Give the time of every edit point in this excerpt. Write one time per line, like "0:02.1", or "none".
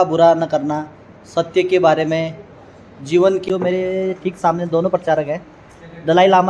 0:03.4